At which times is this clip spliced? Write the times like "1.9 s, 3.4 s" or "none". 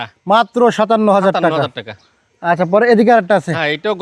none